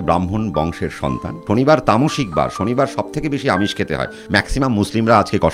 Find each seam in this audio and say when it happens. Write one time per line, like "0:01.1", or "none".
0:01.3
0:04.2